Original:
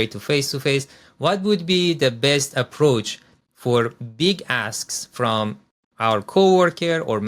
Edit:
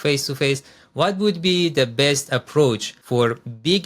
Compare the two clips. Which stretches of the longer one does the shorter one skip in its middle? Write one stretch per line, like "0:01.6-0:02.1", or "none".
0:03.2-0:03.5